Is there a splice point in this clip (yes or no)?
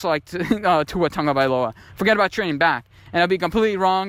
no